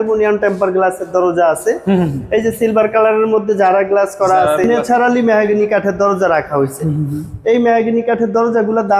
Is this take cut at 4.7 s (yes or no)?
yes